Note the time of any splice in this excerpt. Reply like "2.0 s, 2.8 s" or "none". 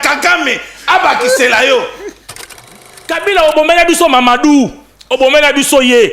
2.8 s